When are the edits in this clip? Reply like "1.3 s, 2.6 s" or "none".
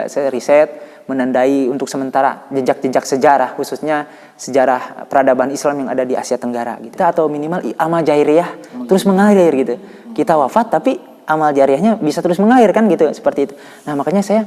6.9 s